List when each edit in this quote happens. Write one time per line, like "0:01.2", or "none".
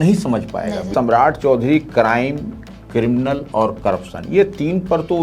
0:00.9